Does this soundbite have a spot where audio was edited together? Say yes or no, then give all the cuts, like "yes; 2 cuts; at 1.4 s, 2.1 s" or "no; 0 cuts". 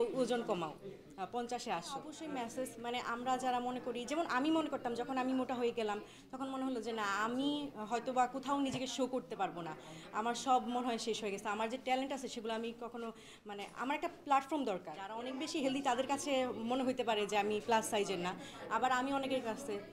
yes; 2 cuts; at 2.1 s, 15.1 s